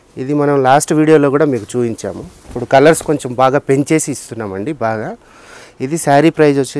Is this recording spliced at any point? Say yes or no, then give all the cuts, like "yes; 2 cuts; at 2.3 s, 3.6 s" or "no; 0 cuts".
no; 0 cuts